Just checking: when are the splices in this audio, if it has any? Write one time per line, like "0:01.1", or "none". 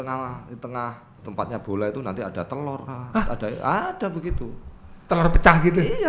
0:01.2